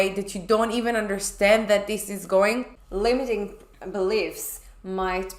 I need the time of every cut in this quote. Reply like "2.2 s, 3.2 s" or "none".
2.7 s